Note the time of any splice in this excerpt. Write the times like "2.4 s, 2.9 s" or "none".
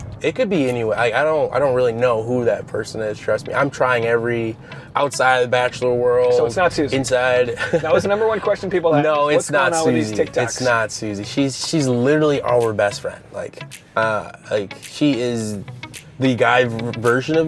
none